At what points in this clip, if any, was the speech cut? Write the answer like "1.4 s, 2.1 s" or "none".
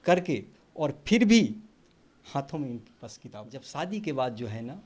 3.6 s